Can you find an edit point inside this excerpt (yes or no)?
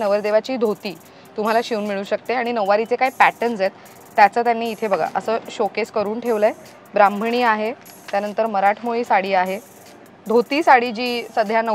no